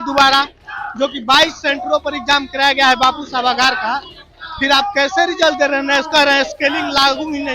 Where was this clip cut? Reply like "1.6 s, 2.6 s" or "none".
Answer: none